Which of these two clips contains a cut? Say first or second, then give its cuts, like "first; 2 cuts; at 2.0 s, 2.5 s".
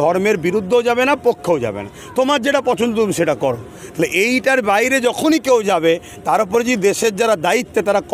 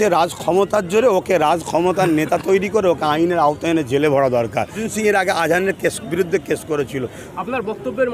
second; 2 cuts; at 4.8 s, 7.2 s